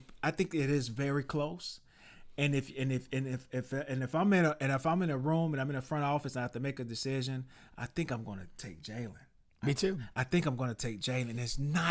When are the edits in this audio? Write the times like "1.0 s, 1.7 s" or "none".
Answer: none

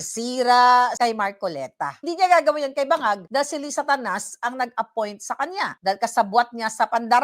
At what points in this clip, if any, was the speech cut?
0.9 s, 3.2 s, 5.7 s

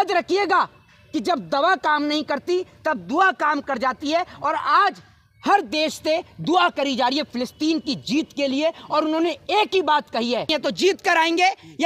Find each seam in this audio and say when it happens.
10.5 s

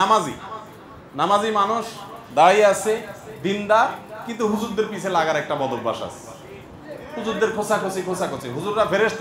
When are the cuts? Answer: none

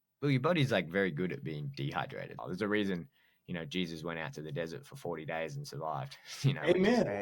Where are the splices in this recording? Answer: 2.4 s

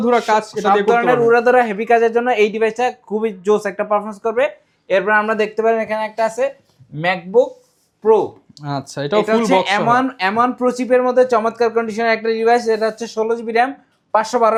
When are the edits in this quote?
none

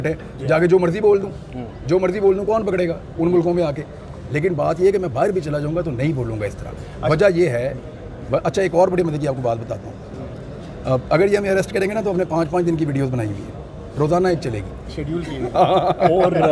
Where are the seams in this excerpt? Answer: none

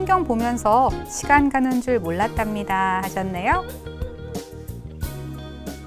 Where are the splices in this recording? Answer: 3.6 s

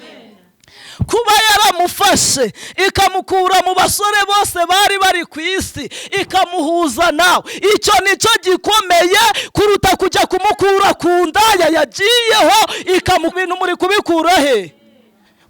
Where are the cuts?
13.3 s

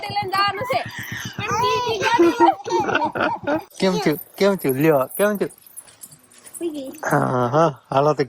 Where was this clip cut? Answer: 3.7 s

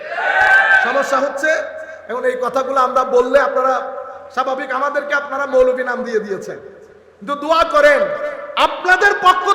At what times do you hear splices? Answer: none

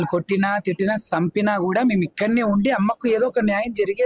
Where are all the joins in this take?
none

